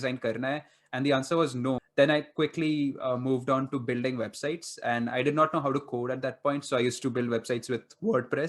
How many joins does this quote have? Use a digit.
1